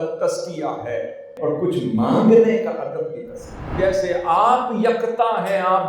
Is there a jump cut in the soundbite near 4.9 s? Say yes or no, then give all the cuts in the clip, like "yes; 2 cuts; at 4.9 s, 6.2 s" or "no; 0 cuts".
no; 2 cuts; at 1.3 s, 3.7 s